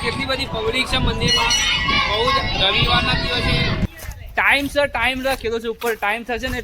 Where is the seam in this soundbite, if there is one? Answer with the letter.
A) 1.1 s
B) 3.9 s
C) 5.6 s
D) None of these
B